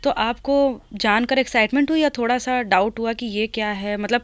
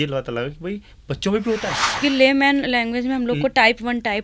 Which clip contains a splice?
second; 1 cut; at 2.0 s

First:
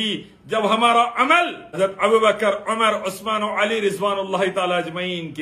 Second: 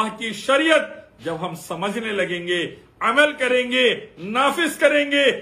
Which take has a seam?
first; 1 cut; at 1.8 s

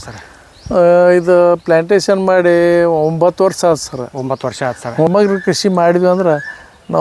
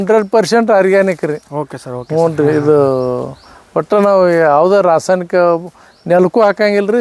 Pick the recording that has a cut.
first; 1 cut; at 5.1 s

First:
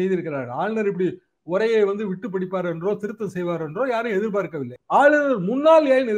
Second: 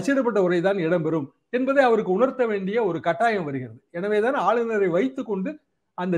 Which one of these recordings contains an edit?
first; 1 cut; at 4.7 s

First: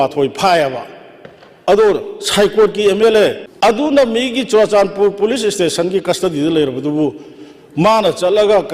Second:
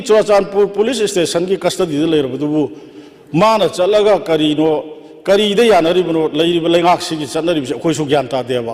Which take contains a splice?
first; 1 cut; at 3.4 s

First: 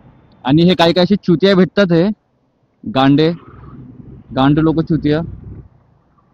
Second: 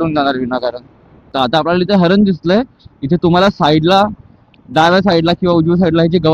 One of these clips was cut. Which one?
second; 1 cut; at 1.3 s

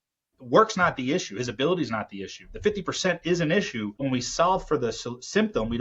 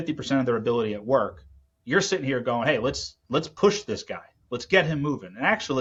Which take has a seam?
first; 1 cut; at 4.0 s

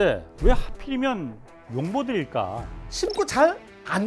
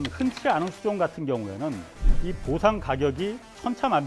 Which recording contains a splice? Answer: first; 1 cut; at 2.8 s

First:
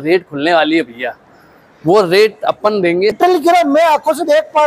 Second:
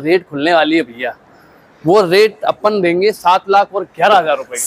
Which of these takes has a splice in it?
first; 1 cut; at 3.2 s

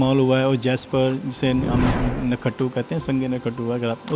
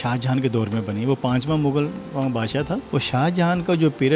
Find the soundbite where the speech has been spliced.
second; 1 cut; at 2.8 s

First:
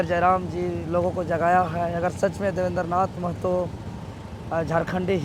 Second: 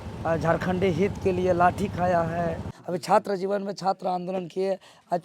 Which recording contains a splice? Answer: second; 1 cut; at 2.7 s

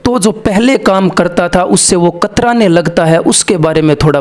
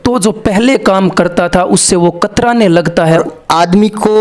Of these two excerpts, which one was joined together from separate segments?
second; 1 cut; at 3.2 s

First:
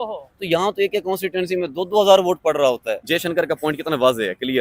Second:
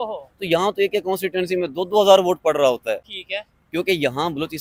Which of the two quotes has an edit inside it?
first; 1 cut; at 3.0 s

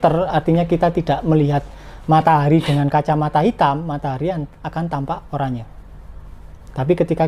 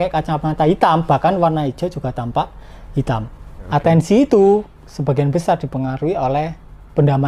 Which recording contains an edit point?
second; 1 cut; at 3.6 s

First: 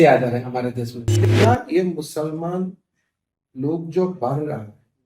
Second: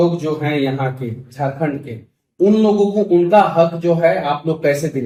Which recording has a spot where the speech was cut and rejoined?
first; 1 cut; at 1.1 s

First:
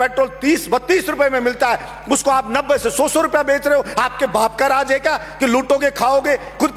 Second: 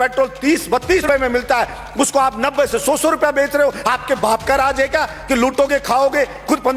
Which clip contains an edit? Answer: second; 1 cut; at 1.0 s

